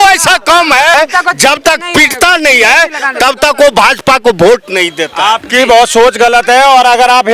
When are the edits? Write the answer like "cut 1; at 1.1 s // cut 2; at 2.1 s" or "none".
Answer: cut 1; at 0.9 s

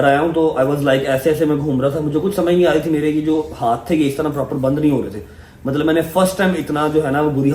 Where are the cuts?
none

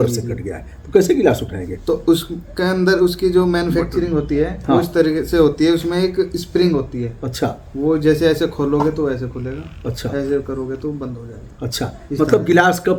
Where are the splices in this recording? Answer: none

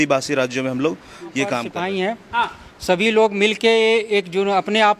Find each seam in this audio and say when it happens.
cut 1; at 1.7 s

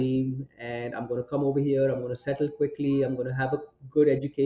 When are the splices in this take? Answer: none

